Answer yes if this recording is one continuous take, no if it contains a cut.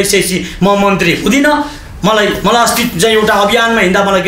yes